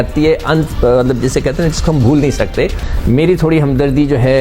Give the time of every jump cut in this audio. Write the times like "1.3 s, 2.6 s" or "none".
2.9 s